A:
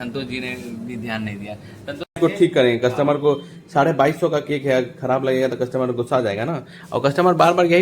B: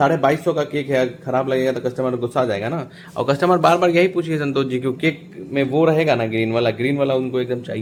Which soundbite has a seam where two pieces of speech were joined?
A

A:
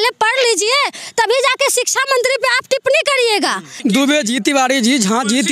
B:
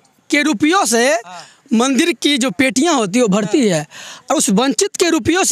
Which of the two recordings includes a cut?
A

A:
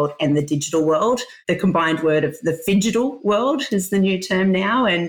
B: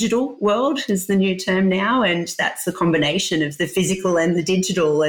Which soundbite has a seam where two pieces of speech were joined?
A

